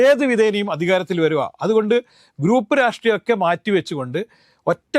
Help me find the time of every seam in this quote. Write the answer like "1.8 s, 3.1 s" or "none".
none